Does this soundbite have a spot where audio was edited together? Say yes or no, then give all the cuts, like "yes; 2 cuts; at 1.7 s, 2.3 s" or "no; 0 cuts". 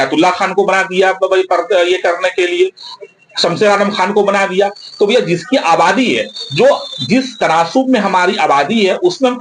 no; 0 cuts